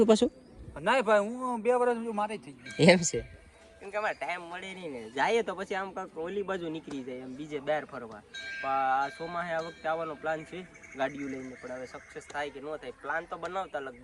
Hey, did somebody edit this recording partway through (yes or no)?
no